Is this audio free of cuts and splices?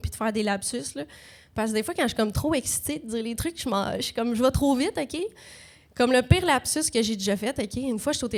yes; 0 cuts

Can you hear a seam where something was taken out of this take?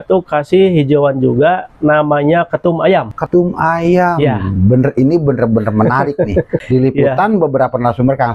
yes; 2 cuts; at 3.2 s, 6.6 s

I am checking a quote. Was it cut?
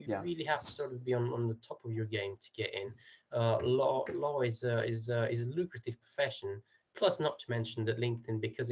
yes; 1 cut; at 6.8 s

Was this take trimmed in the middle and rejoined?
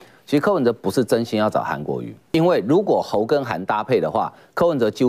yes; 1 cut; at 2.2 s

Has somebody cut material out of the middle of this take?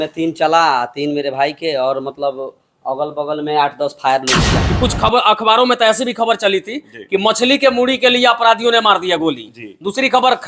yes; 1 cut; at 4.5 s

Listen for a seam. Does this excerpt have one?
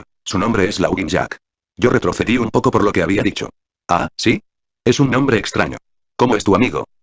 yes; 1 cut; at 3.9 s

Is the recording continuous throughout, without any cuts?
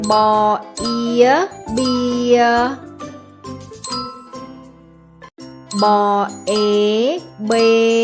yes; 0 cuts

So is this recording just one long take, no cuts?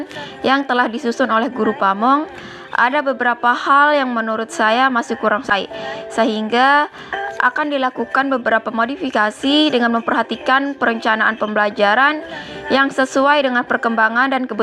no; 1 cut; at 5.5 s

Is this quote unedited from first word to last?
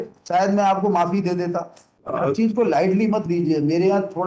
no; 1 cut; at 2.2 s

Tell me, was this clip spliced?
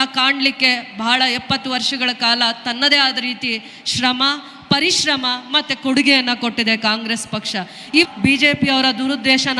yes; 1 cut; at 8.1 s

